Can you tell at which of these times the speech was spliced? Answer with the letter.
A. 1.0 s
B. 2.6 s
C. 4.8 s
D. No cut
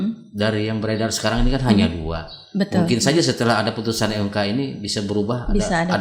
D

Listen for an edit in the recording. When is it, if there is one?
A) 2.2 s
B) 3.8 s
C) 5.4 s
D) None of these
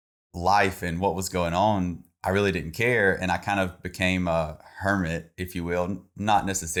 D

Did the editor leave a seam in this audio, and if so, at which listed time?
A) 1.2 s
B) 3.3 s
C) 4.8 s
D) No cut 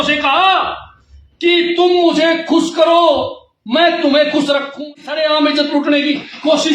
C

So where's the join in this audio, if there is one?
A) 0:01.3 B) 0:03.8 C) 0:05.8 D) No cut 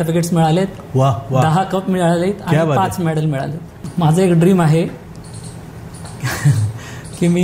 B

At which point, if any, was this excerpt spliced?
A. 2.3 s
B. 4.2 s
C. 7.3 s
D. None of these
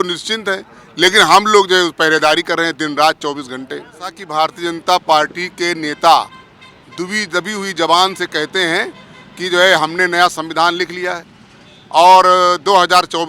B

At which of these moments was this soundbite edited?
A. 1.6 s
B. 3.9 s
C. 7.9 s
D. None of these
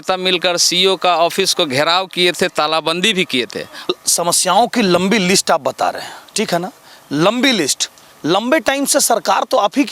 B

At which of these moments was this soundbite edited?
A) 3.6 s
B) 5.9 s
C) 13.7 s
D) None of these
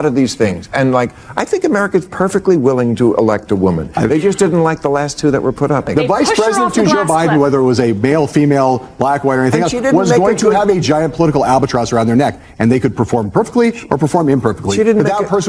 B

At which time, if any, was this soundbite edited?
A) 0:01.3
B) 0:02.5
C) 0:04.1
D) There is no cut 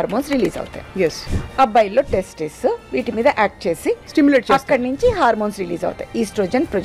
A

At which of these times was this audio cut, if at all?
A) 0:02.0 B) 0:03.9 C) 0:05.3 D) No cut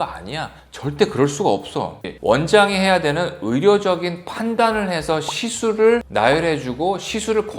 A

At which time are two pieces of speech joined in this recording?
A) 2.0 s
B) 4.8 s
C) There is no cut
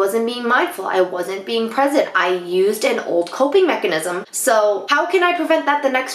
B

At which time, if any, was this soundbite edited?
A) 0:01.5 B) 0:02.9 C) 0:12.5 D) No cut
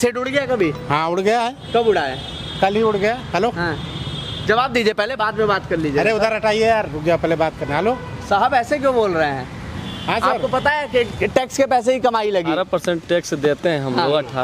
C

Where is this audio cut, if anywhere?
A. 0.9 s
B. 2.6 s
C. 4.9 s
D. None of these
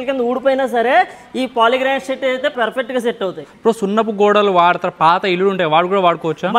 B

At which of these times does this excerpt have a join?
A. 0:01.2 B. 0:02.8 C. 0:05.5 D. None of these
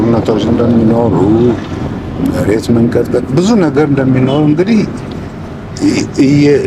D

